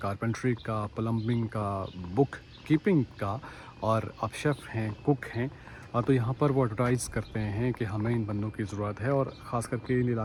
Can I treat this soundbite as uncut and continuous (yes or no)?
yes